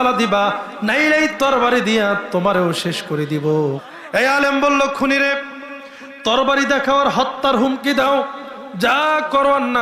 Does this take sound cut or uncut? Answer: cut